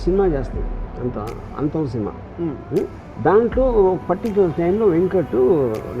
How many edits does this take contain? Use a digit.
1